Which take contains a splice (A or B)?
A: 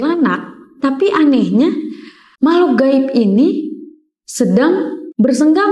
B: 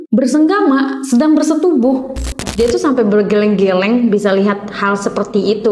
B